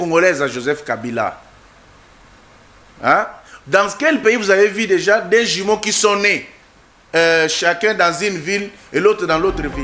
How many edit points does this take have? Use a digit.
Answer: 0